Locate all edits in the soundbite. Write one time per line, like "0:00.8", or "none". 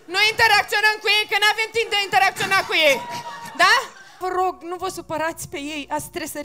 0:04.2